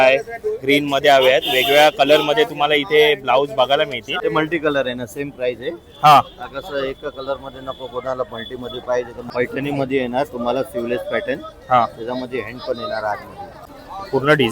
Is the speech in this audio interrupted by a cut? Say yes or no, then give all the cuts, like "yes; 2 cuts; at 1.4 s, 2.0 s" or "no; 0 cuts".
yes; 3 cuts; at 4.0 s, 9.2 s, 13.6 s